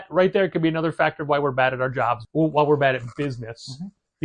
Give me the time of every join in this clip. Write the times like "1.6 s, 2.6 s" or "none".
2.2 s